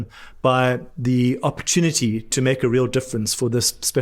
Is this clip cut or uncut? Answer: cut